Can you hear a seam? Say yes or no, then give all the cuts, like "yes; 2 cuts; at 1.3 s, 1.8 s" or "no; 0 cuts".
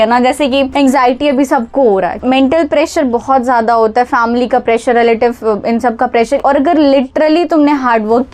yes; 2 cuts; at 2.2 s, 6.4 s